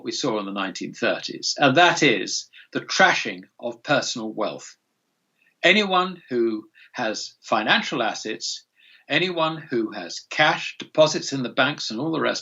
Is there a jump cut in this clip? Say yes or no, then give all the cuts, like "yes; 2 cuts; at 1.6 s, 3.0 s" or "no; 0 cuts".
no; 0 cuts